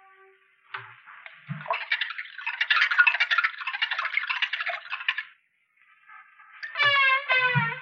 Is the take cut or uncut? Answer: uncut